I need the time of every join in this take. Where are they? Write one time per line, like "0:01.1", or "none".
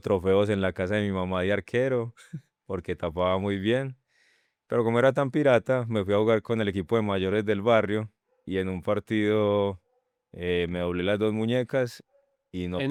none

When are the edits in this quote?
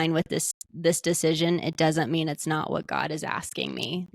0:02.9

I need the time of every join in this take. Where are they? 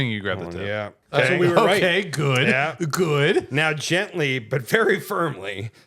0:01.0

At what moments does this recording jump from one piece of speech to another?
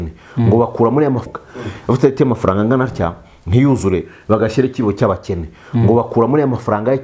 0:01.3

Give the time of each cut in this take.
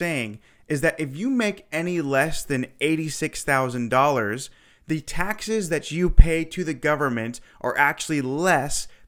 none

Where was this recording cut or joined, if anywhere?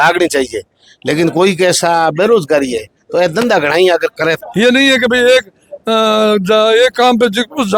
0:04.4

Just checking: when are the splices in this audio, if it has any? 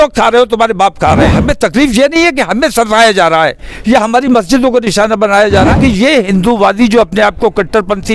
0:01.4
0:05.7

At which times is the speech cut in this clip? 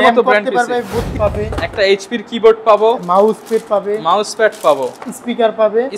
0:01.1

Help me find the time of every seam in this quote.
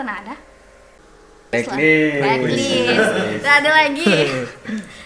none

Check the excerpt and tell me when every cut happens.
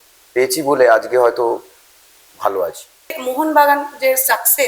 0:03.2

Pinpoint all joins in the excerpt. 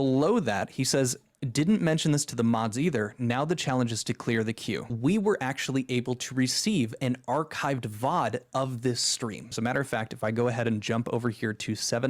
0:04.8
0:09.5

